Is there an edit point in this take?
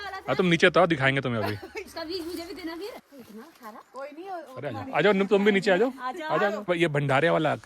yes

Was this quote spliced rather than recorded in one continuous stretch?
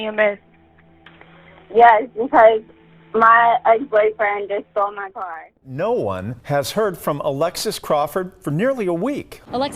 yes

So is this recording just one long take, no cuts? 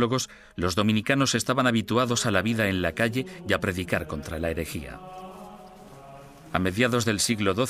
no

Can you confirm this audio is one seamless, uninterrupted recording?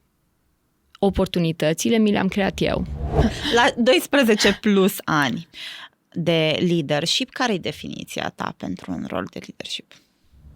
no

